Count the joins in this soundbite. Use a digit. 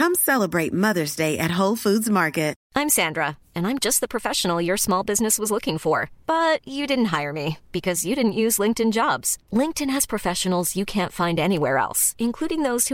1